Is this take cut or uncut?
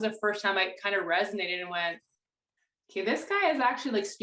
uncut